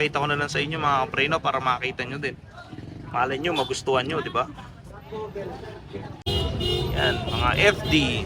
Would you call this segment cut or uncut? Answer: cut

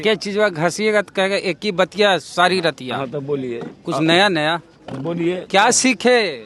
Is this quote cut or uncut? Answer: uncut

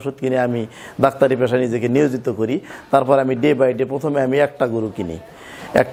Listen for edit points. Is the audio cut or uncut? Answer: uncut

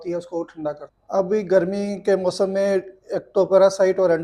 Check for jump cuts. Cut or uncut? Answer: cut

